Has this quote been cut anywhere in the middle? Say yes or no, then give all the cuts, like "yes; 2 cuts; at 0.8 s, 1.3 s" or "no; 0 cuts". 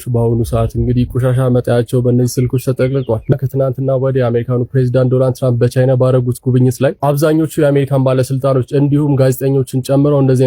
yes; 1 cut; at 3.3 s